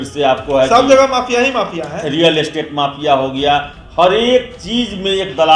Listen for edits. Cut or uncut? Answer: uncut